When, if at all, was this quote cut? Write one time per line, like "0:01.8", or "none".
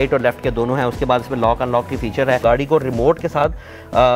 0:02.4